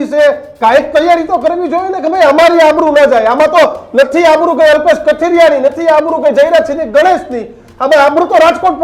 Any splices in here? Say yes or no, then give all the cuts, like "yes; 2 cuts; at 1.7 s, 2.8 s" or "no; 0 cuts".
no; 0 cuts